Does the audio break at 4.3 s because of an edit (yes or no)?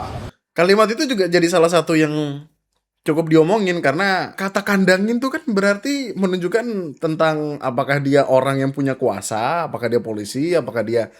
yes